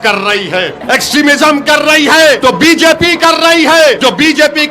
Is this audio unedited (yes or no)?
no